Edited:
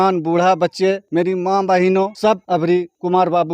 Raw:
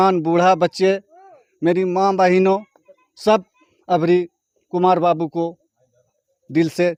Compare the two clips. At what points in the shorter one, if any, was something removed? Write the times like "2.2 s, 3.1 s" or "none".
1.0 s, 2.6 s